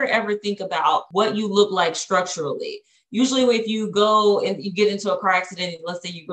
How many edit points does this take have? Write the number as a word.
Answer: one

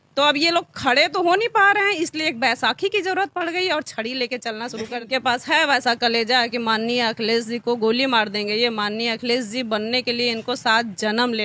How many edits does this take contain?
one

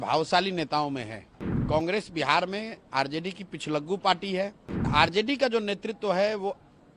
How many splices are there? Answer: two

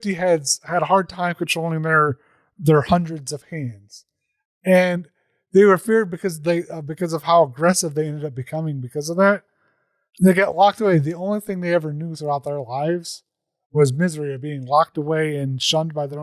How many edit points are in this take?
zero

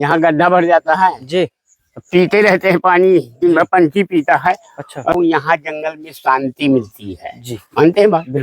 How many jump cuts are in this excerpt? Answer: one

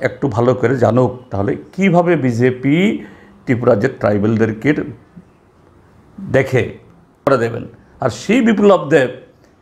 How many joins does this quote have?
one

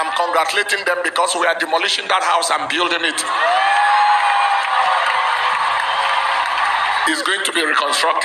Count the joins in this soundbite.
one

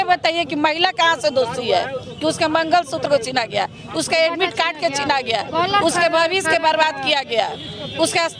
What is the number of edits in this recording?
zero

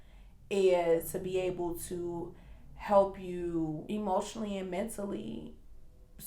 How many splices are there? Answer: two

